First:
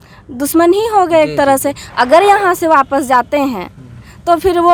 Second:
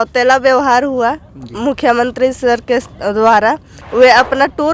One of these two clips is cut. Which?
second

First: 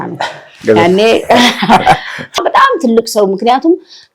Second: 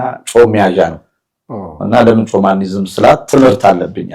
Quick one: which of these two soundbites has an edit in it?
first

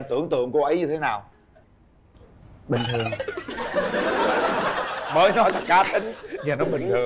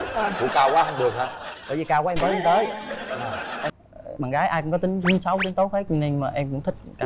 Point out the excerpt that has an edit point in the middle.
second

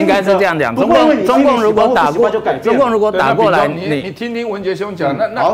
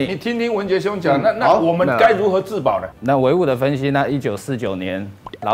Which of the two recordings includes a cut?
second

